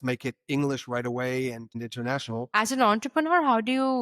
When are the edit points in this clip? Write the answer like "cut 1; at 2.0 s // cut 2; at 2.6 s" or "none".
cut 1; at 2.5 s